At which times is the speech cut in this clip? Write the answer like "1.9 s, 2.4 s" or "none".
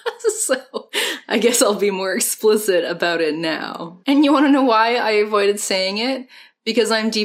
none